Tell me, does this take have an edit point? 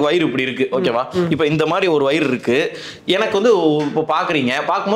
no; 0 cuts

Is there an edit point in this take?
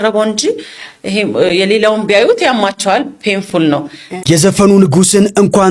yes; 1 cut; at 4.2 s

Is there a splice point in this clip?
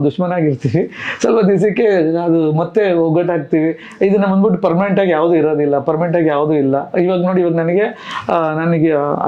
no; 0 cuts

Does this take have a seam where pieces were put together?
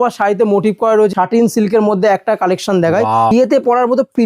yes; 2 cuts; at 1.1 s, 3.3 s

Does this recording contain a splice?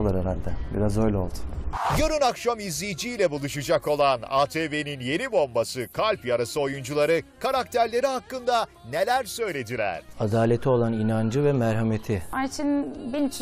yes; 2 cuts; at 1.7 s, 12.3 s

